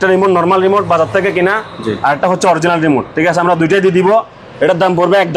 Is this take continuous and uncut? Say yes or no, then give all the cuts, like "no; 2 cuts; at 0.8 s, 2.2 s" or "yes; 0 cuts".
yes; 0 cuts